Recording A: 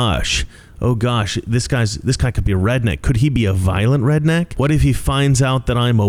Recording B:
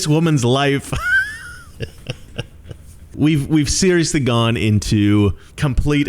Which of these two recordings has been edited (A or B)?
B